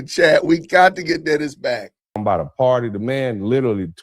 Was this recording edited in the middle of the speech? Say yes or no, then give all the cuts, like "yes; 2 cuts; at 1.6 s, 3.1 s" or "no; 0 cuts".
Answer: yes; 1 cut; at 2.2 s